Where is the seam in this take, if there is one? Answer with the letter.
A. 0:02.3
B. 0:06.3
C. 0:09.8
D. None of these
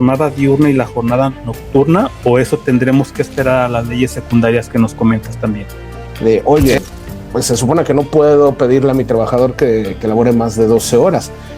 B